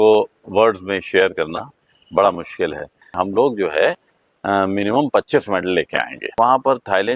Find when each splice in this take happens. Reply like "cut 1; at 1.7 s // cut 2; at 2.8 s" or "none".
cut 1; at 3.1 s // cut 2; at 6.4 s